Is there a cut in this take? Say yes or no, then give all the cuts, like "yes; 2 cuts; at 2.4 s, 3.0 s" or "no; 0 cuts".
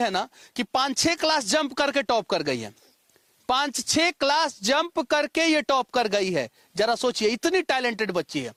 no; 0 cuts